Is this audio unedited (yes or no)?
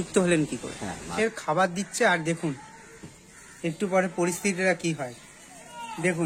no